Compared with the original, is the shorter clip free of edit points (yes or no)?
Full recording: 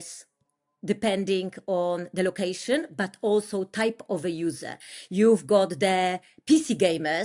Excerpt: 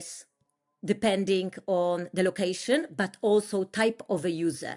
yes